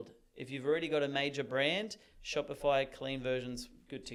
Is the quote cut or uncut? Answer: uncut